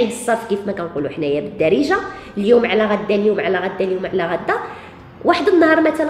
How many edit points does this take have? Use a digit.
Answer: 0